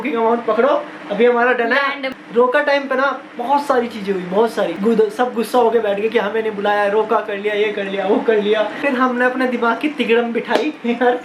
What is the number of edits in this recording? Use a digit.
3